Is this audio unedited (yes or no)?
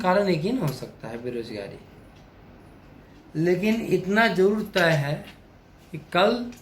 no